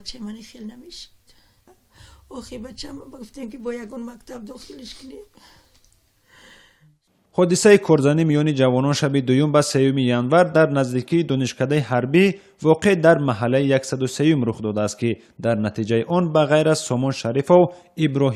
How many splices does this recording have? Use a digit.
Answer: 0